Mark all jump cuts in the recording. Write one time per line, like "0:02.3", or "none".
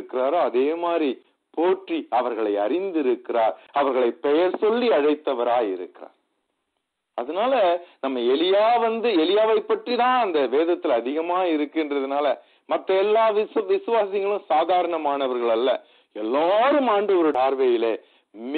0:17.3